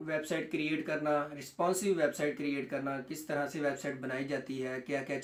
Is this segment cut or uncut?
uncut